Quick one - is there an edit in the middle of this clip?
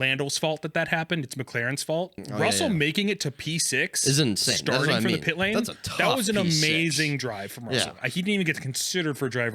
yes; 1 cut; at 2.2 s

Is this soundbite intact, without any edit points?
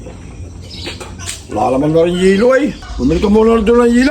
no; 1 cut; at 2.8 s

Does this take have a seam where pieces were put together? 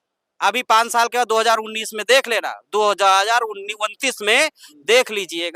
no; 0 cuts

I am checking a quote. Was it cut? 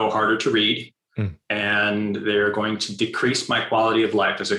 no; 0 cuts

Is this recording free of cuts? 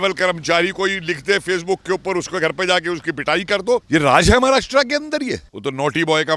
no; 2 cuts; at 3.8 s, 5.5 s

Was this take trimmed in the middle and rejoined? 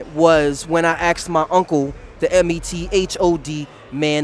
no; 0 cuts

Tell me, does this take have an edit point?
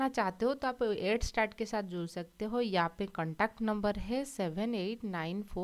no; 0 cuts

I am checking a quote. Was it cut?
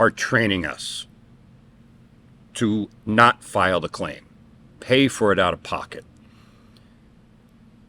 yes; 1 cut; at 2.9 s

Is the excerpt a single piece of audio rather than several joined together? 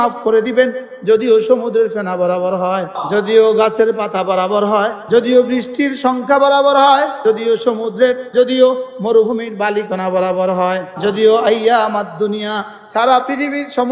no; 5 cuts; at 3.0 s, 5.0 s, 7.1 s, 8.3 s, 10.9 s

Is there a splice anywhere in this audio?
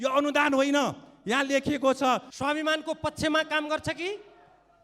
yes; 1 cut; at 2.3 s

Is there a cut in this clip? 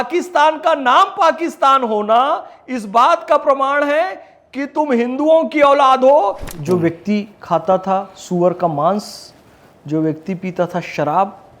yes; 1 cut; at 6.5 s

